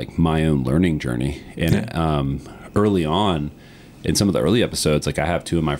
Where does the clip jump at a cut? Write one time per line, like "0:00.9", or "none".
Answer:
none